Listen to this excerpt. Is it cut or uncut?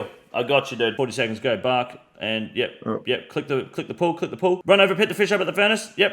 cut